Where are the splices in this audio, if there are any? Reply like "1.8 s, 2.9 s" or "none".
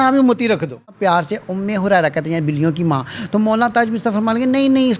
1.0 s